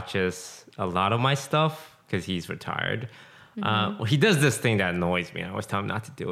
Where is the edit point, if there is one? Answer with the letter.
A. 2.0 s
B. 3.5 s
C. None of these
C